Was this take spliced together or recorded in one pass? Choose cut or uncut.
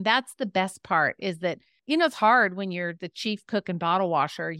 cut